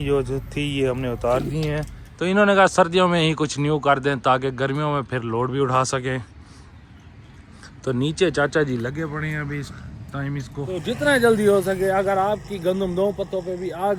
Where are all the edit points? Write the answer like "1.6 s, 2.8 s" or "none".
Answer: 1.8 s, 10.6 s

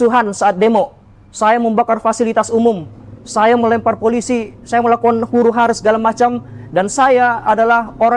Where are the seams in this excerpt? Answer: none

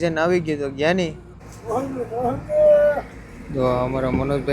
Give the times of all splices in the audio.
1.6 s

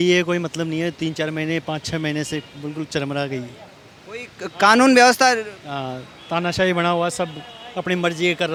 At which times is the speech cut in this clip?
none

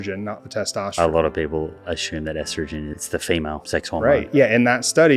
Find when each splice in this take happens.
0.9 s, 3.0 s, 3.9 s

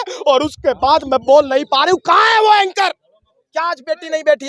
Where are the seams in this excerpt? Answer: none

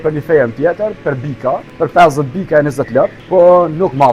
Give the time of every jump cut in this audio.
1.7 s, 3.2 s

